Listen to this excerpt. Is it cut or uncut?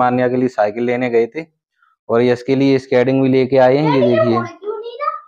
uncut